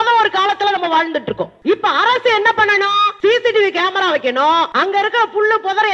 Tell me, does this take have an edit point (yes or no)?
yes